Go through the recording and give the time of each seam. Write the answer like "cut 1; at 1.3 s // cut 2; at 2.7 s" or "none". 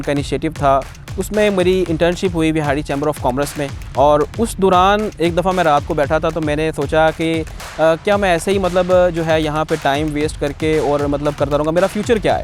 cut 1; at 1.0 s // cut 2; at 3.8 s